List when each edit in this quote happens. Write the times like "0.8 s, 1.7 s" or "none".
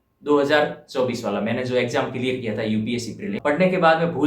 3.4 s